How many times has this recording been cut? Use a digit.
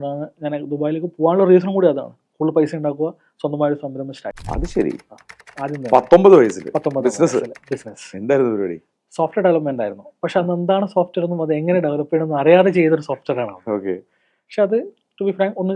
1